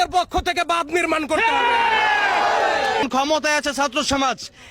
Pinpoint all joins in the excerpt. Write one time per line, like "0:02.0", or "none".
0:03.0

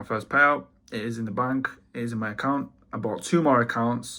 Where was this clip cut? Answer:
none

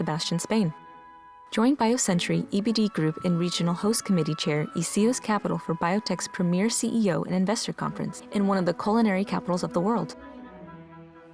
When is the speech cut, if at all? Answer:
0:10.1

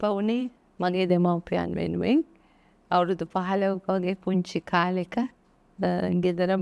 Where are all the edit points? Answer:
none

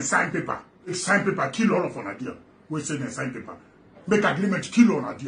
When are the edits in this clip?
0:00.9

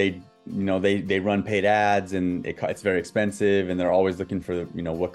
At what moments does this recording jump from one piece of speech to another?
none

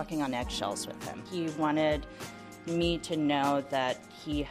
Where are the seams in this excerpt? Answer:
0:01.1

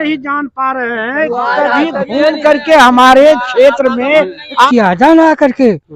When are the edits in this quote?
0:04.7

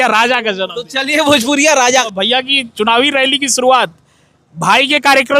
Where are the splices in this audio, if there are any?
0:02.1

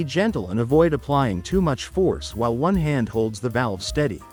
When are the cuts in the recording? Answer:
none

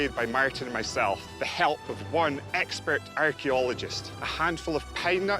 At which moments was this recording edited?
none

